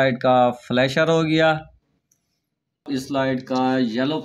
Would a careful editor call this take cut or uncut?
cut